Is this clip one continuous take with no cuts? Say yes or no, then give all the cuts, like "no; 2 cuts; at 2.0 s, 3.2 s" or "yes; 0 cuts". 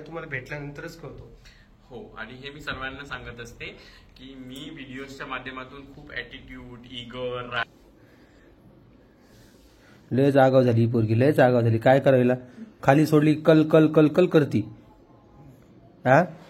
no; 1 cut; at 7.7 s